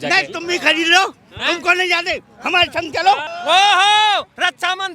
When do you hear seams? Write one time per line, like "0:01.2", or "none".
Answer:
0:03.3